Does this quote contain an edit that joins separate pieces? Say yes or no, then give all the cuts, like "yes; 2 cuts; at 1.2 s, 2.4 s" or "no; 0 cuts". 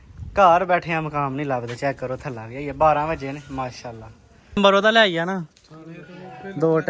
yes; 1 cut; at 4.6 s